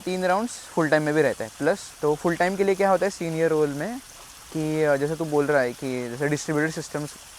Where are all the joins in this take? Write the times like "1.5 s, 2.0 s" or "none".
none